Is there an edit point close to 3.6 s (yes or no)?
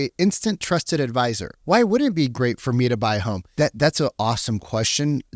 no